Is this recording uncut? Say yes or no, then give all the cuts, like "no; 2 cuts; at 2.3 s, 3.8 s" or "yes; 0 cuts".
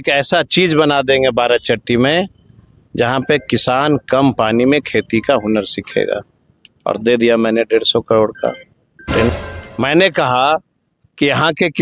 no; 1 cut; at 9.3 s